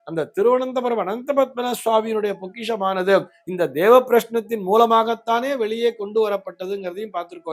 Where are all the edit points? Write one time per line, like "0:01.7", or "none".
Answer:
none